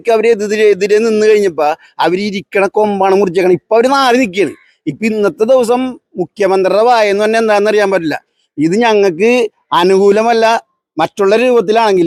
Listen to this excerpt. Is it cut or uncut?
uncut